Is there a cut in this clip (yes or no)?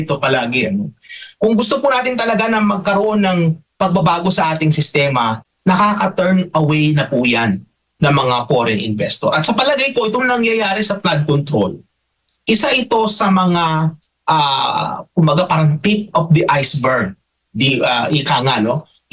yes